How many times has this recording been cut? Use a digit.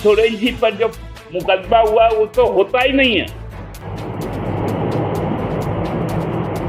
1